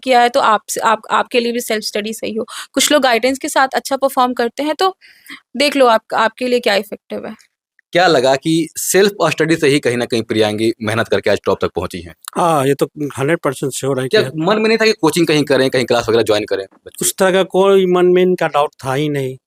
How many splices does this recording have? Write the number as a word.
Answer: zero